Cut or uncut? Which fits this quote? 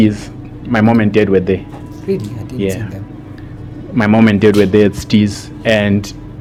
uncut